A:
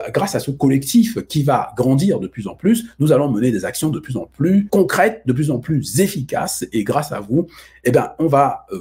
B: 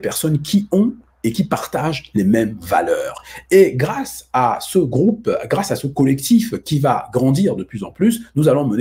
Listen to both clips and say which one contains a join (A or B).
A